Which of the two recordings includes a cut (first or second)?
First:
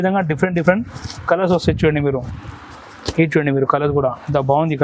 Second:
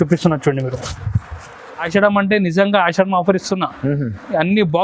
second